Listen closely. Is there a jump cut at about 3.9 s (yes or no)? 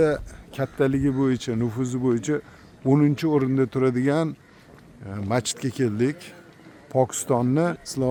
no